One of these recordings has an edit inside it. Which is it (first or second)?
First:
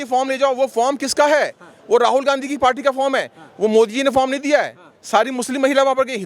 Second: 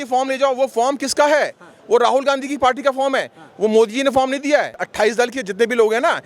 second